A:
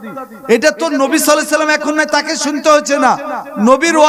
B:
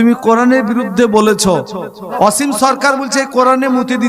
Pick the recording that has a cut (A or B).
B